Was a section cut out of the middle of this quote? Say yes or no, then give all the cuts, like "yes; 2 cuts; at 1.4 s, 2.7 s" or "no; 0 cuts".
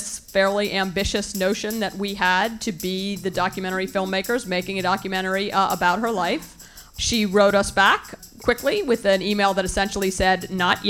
no; 0 cuts